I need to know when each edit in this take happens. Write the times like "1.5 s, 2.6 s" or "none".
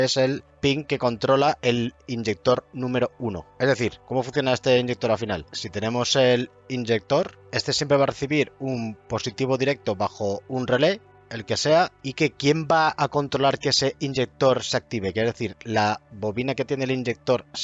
none